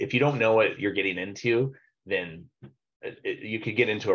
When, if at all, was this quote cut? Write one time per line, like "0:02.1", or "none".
none

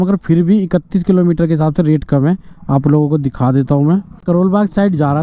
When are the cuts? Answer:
0:04.2

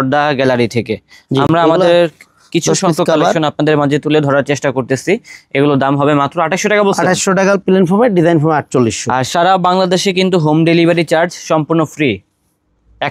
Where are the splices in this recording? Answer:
none

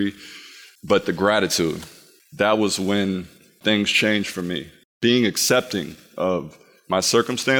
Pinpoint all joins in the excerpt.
none

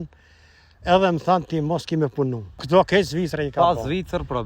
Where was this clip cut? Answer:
0:02.5

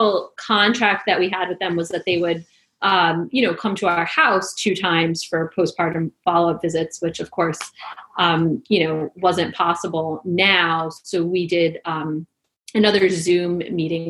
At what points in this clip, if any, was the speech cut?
none

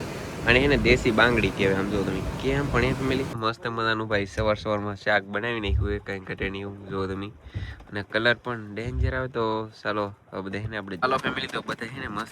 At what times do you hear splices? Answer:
0:03.4
0:11.0

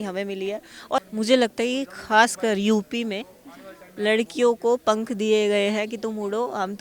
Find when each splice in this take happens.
0:01.0

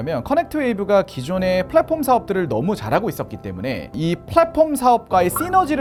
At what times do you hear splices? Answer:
none

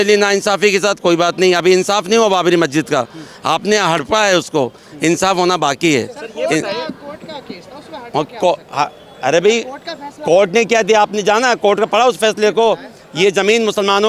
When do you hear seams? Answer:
none

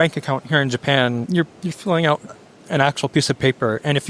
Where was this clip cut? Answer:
0:01.3

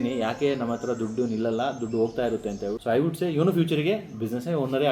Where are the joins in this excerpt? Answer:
0:02.7

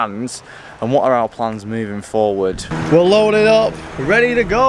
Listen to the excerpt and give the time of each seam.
0:02.7

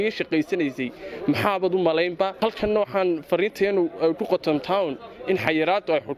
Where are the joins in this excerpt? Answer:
0:02.3

